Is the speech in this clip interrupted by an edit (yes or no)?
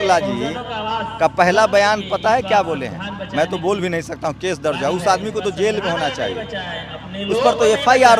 no